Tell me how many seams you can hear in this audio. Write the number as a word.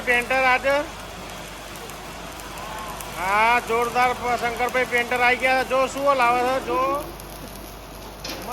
zero